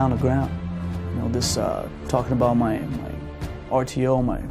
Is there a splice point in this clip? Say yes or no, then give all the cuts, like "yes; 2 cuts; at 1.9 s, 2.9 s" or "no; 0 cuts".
no; 0 cuts